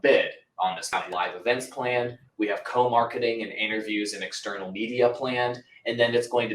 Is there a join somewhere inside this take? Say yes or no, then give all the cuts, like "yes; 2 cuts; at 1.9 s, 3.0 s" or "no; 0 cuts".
yes; 1 cut; at 0.9 s